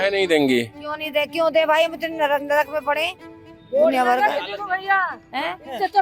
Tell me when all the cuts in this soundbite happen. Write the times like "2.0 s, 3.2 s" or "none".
none